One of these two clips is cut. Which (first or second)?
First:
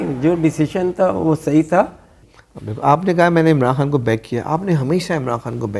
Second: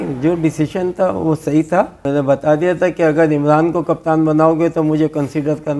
second